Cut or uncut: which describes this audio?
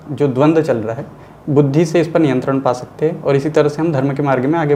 uncut